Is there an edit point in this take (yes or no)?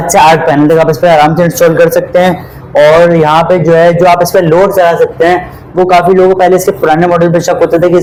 no